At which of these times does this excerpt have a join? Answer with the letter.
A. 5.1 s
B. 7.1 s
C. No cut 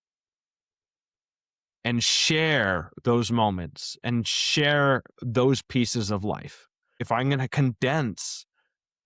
B